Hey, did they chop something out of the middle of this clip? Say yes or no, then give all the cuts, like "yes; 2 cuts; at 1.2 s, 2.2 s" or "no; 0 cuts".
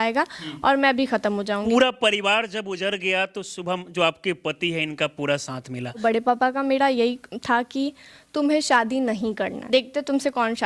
yes; 3 cuts; at 1.6 s, 6.0 s, 9.6 s